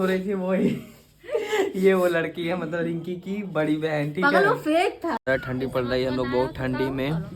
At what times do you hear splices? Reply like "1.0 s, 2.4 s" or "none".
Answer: 5.2 s